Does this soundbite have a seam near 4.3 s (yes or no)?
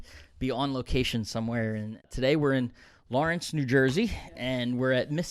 no